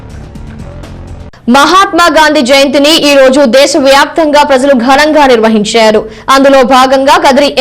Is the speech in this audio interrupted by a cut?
yes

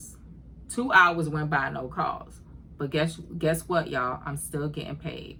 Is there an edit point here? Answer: no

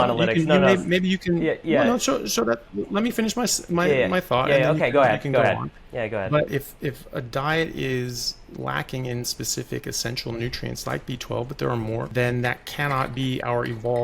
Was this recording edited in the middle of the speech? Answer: yes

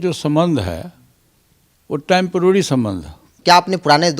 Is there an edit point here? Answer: yes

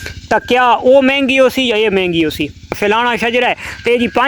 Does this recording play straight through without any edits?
no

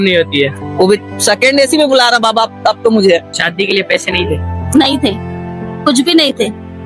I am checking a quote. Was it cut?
yes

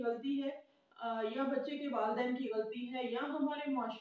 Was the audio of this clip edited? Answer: no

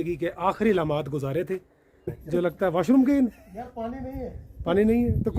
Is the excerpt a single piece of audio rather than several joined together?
no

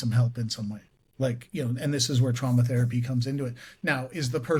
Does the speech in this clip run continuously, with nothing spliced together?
yes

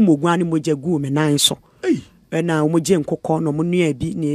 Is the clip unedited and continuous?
yes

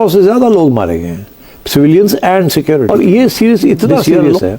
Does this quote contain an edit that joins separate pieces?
yes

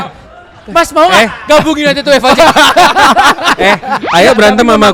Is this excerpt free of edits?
yes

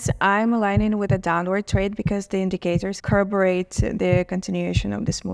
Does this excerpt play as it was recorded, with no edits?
no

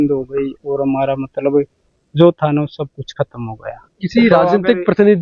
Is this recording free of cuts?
yes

